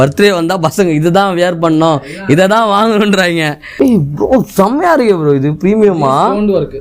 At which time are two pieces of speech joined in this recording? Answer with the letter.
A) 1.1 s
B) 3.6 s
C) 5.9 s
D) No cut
B